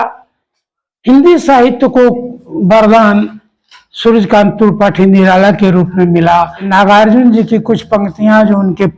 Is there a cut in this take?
yes; 1 cut; at 6.6 s

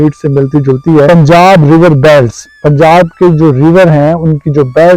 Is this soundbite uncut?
no; 1 cut; at 1.1 s

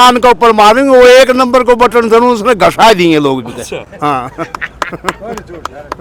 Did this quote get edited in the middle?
no; 0 cuts

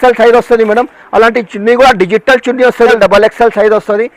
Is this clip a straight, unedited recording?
no; 1 cut; at 2.9 s

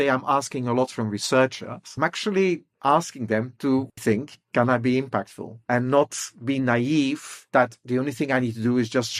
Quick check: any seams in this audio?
yes; 1 cut; at 1.9 s

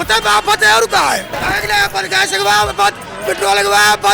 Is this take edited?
yes; 1 cut; at 1.3 s

